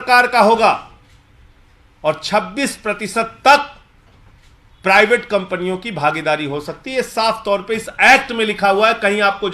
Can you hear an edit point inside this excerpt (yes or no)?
no